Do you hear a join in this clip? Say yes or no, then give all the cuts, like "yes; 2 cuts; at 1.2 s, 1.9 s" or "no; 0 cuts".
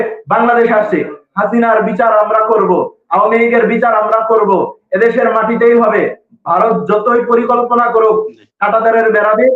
yes; 1 cut; at 1.2 s